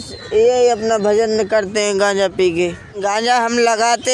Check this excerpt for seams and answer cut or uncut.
cut